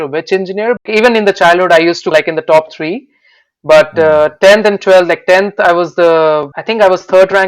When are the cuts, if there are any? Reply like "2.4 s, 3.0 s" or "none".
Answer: 0.8 s, 6.6 s

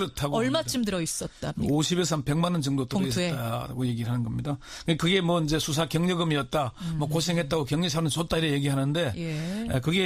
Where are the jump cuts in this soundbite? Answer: 4.2 s

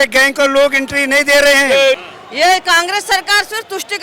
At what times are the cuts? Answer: 2.1 s

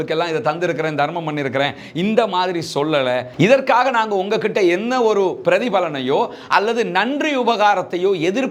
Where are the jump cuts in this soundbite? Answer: 3.3 s

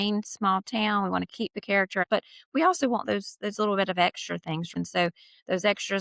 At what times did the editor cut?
2.0 s, 4.7 s

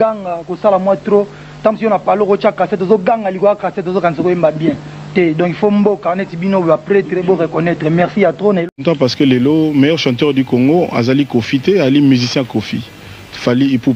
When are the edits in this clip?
8.7 s

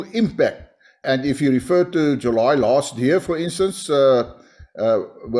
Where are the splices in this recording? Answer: 1.0 s

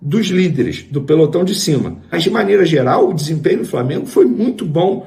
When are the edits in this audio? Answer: 2.0 s

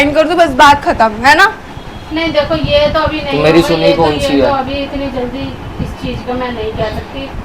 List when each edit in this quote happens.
none

